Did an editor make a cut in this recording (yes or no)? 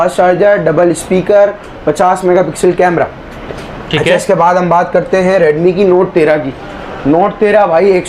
no